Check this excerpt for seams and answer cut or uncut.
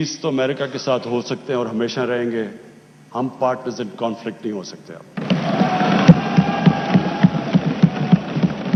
uncut